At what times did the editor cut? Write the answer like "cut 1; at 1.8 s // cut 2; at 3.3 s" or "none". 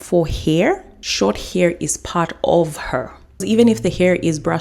cut 1; at 1.0 s // cut 2; at 3.4 s